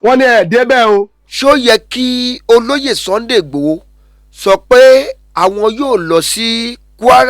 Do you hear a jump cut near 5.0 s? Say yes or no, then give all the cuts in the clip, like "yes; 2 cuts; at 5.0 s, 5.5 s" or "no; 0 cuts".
no; 1 cut; at 1.2 s